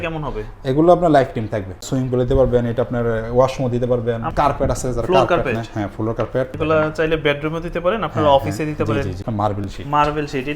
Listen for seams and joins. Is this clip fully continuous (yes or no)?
no